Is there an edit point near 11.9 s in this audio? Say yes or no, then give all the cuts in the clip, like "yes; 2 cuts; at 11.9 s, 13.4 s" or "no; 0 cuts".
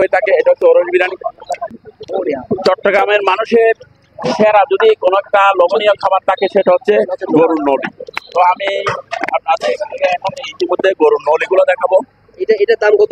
no; 1 cut; at 1.8 s